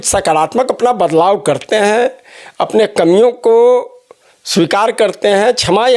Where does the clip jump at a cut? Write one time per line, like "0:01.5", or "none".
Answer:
none